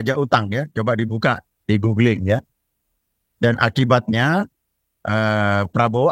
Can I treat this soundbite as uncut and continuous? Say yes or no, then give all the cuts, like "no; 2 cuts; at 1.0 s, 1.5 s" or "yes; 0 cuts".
yes; 0 cuts